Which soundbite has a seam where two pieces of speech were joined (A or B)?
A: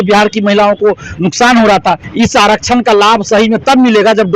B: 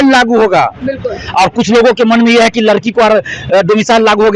A